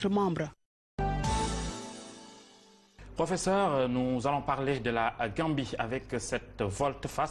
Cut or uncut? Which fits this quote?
uncut